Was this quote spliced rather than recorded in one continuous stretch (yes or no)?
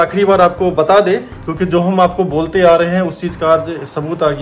yes